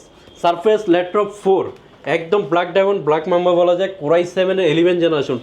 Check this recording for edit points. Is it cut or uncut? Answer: uncut